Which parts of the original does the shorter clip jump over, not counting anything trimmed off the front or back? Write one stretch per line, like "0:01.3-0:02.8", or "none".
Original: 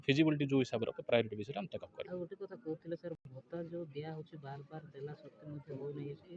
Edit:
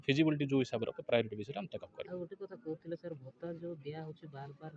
0:03.3-0:03.4